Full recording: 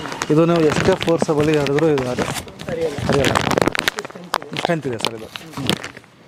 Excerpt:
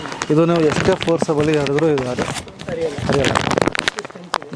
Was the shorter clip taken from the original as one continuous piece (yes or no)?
yes